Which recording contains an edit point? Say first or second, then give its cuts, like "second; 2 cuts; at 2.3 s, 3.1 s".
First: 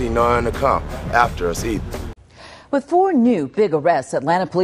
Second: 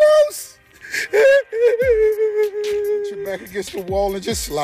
first; 1 cut; at 2.0 s